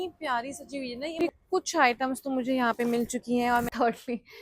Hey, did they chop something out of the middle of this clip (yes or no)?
yes